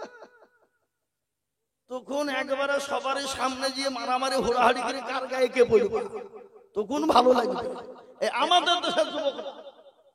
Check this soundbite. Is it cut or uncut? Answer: uncut